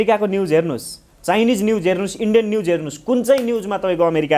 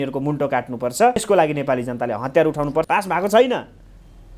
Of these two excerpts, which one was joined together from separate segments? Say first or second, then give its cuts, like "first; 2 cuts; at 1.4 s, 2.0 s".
second; 2 cuts; at 1.2 s, 2.9 s